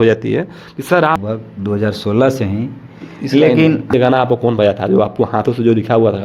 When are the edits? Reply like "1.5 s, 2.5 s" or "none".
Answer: 1.2 s, 3.9 s